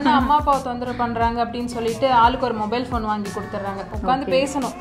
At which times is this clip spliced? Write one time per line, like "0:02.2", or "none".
0:03.9